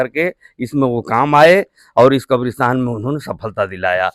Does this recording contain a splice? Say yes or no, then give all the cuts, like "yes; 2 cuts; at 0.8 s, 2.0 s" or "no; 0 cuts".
no; 0 cuts